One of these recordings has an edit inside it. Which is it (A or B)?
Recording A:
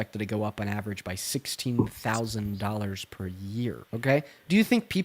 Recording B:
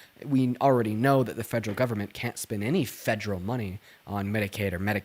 A